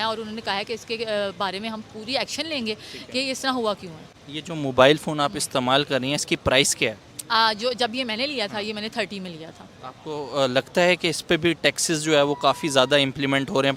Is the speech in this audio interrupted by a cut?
no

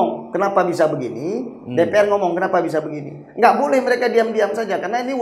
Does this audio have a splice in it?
no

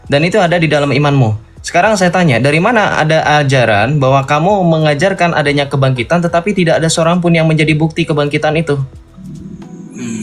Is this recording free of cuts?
yes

